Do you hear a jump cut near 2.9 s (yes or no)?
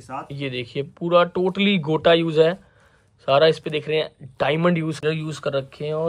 no